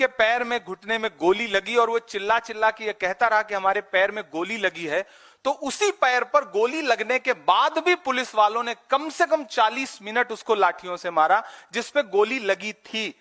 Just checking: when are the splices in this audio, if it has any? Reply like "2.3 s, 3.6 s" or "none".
none